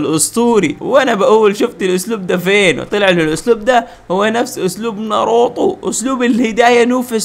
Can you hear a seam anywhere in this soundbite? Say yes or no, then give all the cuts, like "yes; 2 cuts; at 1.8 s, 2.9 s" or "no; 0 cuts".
no; 0 cuts